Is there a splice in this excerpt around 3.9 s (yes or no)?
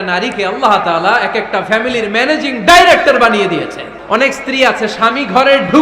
yes